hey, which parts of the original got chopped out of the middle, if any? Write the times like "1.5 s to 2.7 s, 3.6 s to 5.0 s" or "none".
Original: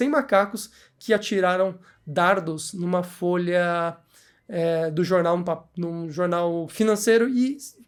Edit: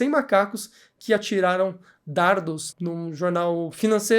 2.7 s to 5.7 s